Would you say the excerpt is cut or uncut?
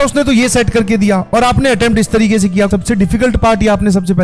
cut